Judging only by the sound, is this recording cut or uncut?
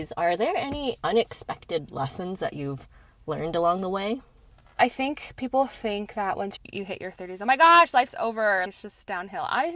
cut